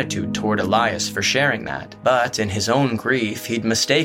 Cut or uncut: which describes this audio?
cut